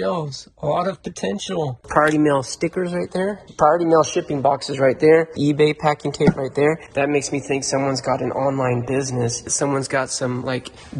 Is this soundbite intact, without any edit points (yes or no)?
no